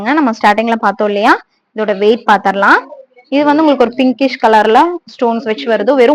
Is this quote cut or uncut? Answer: uncut